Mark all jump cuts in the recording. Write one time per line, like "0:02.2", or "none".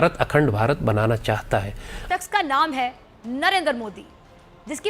0:02.1